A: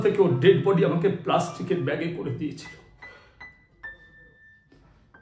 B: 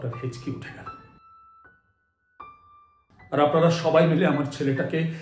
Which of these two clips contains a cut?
B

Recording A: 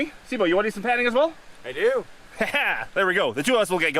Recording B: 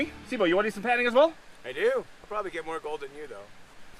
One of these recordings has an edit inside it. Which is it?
B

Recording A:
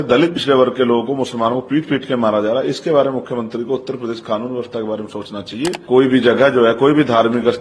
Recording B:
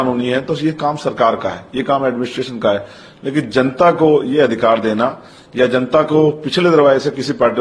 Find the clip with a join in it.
A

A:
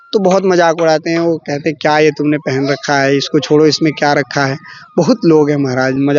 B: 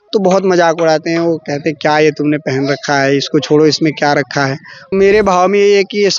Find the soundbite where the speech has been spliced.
B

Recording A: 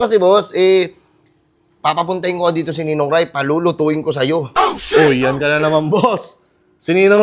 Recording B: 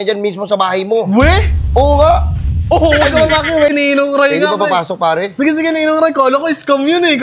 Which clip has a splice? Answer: B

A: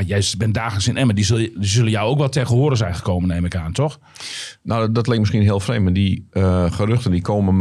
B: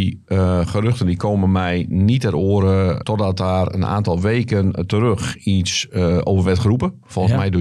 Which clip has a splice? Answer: B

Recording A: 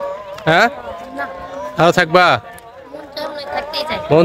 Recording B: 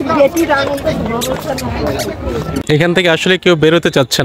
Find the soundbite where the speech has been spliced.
B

